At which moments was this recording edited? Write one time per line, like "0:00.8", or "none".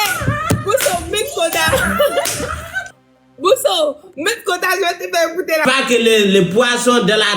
0:05.6